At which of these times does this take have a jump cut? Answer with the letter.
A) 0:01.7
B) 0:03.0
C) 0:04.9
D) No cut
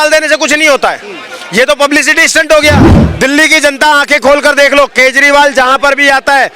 B